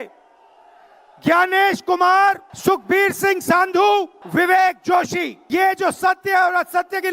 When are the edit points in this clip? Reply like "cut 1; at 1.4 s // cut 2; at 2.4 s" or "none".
cut 1; at 2.5 s // cut 2; at 4.2 s // cut 3; at 5.4 s